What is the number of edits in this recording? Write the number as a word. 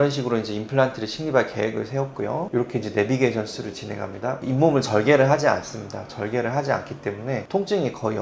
zero